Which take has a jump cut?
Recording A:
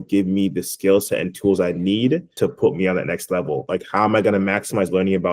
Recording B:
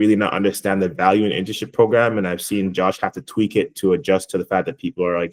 A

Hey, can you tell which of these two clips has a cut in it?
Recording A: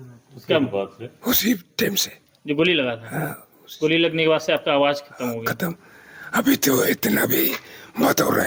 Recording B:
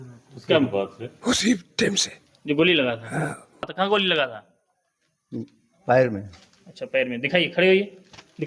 B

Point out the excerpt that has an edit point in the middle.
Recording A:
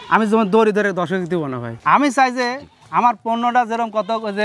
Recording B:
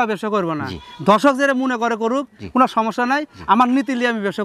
A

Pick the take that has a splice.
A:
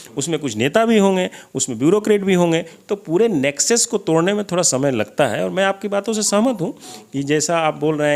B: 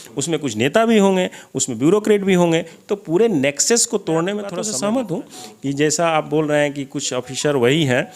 B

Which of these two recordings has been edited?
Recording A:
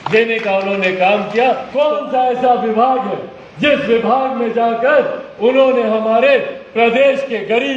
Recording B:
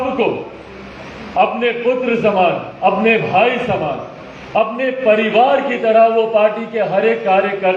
A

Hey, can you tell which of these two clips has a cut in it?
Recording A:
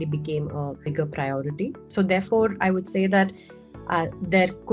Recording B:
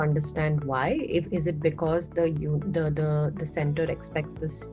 A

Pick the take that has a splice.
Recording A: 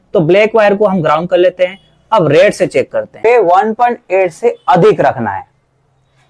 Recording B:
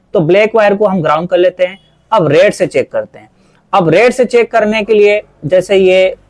A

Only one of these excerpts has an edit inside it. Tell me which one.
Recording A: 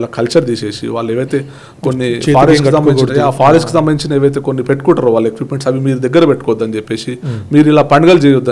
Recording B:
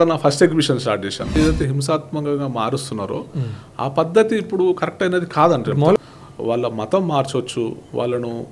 B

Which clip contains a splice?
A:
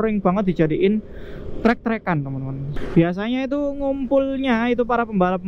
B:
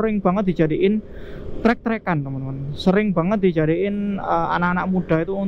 A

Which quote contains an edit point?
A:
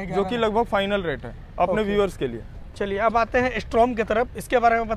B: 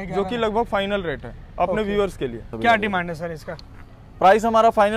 B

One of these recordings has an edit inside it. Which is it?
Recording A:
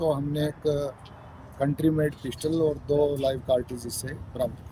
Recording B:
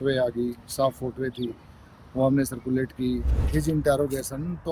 B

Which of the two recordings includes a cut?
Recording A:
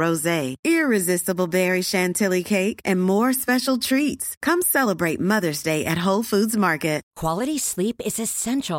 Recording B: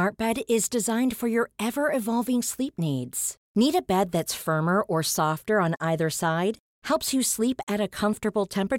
A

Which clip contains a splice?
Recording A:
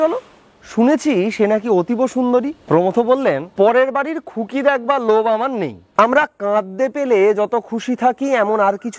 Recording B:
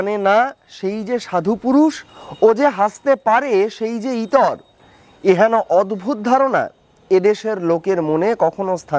A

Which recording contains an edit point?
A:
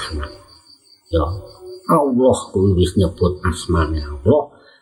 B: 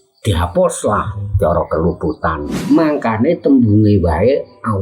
B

